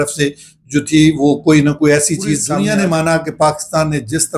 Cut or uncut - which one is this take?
cut